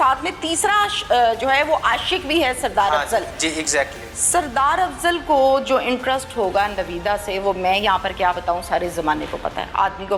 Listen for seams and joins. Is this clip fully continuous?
yes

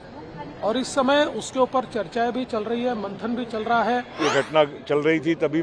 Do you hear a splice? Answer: yes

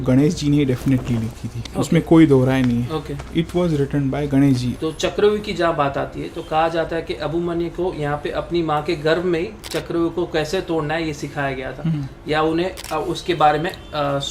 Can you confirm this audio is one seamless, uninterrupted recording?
no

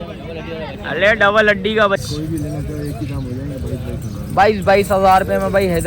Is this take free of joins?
no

